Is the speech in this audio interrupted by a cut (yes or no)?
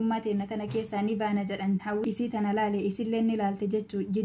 yes